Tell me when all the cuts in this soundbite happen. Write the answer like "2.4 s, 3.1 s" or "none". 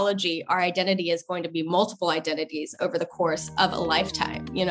none